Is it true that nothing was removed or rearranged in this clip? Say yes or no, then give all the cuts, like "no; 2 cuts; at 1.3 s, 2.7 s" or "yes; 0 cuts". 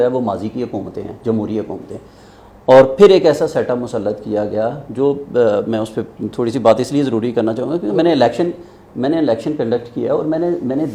yes; 0 cuts